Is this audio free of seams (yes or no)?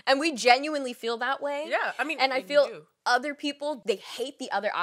no